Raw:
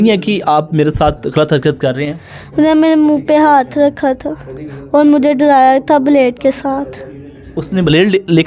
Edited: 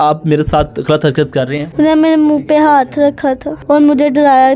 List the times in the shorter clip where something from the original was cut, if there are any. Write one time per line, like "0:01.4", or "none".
0:01.6
0:03.5